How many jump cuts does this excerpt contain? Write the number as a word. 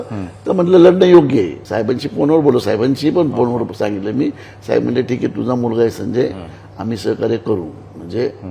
one